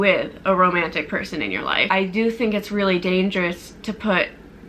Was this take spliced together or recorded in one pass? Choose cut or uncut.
cut